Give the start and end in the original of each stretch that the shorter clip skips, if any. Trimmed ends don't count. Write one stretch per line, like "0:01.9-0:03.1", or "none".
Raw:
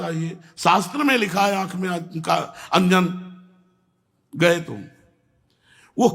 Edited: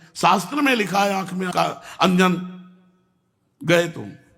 0:01.9-0:02.2